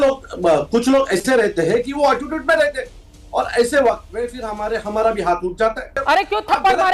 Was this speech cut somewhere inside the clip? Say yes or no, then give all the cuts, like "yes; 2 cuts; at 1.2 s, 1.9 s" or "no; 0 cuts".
yes; 1 cut; at 6.0 s